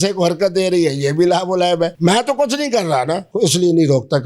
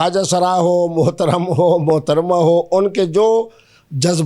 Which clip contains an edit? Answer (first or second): first